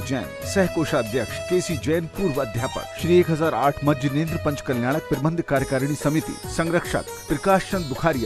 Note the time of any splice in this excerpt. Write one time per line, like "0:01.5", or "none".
0:01.4
0:02.9